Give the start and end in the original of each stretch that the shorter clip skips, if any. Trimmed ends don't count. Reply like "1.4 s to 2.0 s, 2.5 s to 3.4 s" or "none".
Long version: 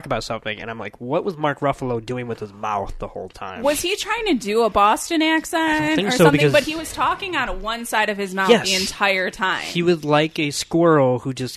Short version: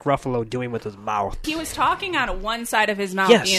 3.0 s to 6.6 s